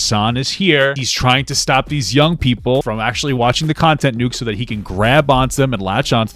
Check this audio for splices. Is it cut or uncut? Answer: cut